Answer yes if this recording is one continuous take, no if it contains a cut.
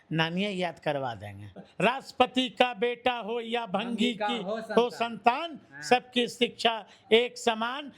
no